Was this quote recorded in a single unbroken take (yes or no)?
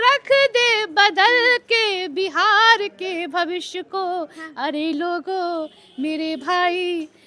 yes